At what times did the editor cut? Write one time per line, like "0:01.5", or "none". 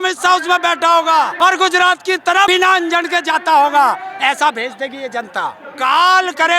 0:01.3
0:02.5
0:05.6